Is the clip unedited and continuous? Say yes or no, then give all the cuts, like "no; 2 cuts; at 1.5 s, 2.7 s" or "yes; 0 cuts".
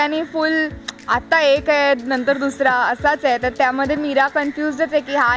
yes; 0 cuts